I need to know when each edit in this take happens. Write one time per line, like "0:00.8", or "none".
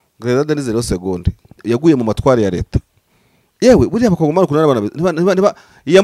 0:01.6